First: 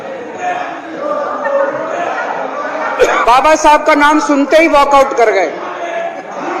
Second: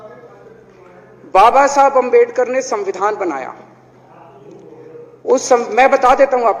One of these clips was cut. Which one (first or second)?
first